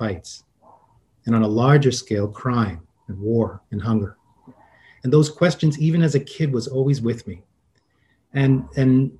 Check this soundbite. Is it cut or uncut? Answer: uncut